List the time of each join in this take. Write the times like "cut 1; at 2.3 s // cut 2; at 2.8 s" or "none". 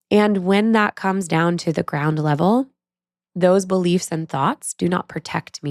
none